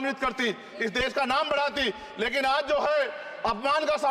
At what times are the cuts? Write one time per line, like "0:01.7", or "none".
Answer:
none